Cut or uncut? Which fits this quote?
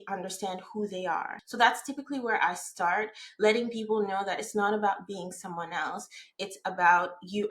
cut